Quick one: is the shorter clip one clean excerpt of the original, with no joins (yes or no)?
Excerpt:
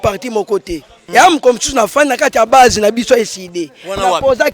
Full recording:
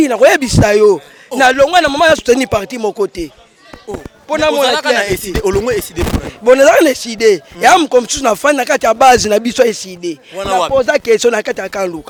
no